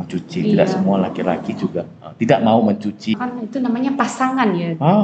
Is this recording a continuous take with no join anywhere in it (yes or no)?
no